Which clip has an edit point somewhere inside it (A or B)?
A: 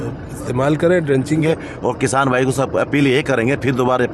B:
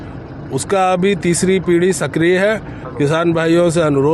A